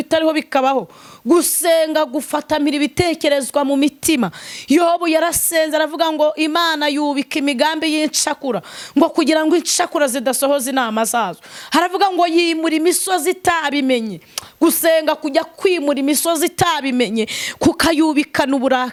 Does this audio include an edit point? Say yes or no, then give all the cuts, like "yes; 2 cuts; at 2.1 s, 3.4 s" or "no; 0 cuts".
no; 0 cuts